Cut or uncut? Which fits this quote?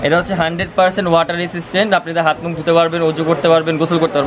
uncut